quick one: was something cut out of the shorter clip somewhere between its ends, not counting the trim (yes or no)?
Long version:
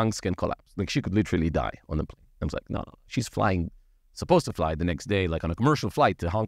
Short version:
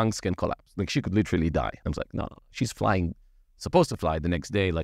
yes